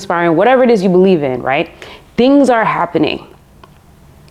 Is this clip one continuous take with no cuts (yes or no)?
yes